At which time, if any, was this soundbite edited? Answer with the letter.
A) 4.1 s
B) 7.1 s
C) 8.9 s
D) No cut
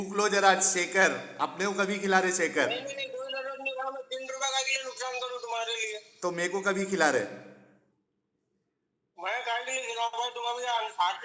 D